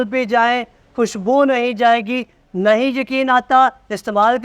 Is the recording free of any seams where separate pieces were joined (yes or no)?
yes